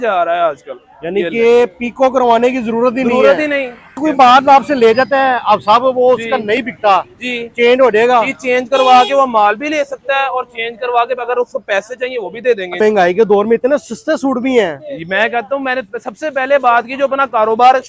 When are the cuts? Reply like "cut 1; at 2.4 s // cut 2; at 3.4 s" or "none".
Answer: cut 1; at 4.0 s // cut 2; at 12.7 s